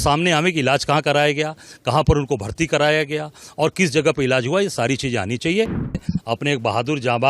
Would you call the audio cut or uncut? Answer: cut